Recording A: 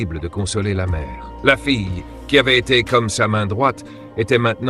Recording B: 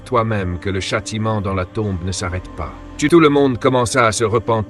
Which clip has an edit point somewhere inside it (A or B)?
B